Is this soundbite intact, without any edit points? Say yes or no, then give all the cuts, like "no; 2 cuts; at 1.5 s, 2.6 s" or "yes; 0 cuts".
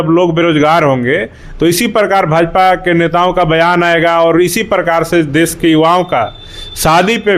yes; 0 cuts